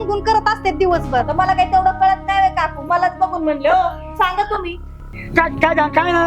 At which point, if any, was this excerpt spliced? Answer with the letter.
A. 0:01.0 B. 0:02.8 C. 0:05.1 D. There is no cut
C